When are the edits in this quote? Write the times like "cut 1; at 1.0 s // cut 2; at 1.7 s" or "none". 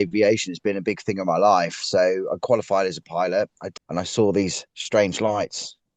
cut 1; at 3.6 s